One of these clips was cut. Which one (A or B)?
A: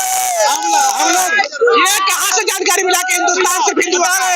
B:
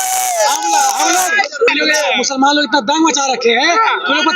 B